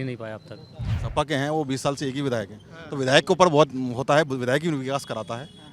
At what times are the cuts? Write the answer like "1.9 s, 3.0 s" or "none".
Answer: 1.0 s